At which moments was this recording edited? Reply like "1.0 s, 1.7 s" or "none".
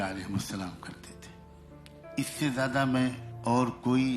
0.9 s, 2.2 s, 3.3 s